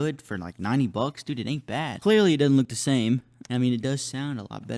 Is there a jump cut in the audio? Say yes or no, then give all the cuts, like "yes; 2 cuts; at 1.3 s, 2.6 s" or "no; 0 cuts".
yes; 2 cuts; at 1.9 s, 3.4 s